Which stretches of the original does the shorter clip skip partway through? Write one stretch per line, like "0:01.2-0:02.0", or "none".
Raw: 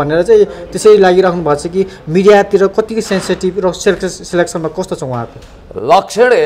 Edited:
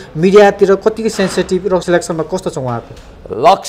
0:03.8-0:04.3